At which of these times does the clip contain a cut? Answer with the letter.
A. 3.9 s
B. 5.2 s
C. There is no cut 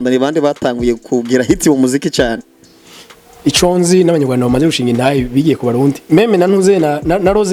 C